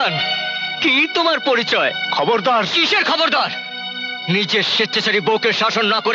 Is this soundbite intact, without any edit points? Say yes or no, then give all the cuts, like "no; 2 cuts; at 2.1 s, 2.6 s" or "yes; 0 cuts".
yes; 0 cuts